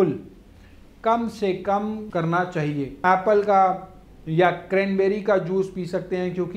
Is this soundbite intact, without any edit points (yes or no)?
no